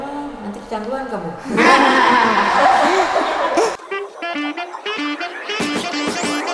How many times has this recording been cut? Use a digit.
1